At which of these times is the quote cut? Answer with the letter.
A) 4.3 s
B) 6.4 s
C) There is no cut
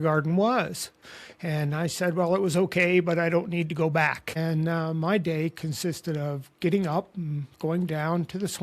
A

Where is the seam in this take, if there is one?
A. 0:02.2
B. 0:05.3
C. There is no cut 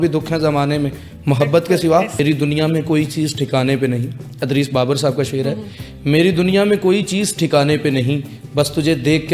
A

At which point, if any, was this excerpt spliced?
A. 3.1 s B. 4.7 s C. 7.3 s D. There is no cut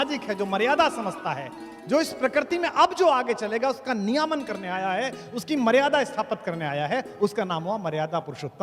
D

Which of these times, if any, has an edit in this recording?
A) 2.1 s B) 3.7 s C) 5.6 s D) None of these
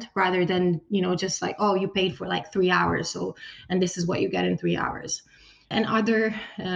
C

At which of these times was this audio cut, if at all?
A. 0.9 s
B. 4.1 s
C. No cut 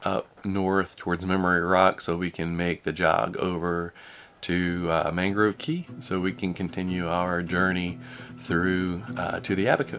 C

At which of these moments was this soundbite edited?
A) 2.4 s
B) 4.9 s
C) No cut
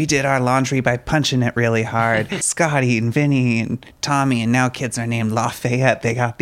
A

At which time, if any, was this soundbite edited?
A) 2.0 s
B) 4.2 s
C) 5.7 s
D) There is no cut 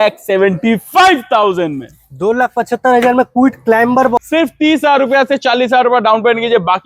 B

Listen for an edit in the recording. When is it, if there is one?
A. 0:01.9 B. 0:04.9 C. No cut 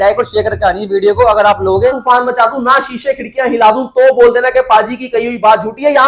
A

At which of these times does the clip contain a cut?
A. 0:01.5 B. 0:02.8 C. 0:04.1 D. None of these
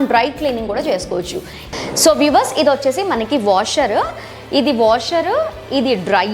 A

